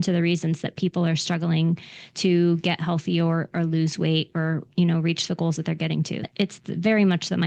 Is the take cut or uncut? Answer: cut